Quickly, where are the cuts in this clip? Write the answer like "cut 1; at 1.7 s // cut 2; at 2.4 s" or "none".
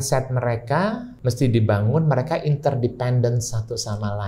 cut 1; at 1.1 s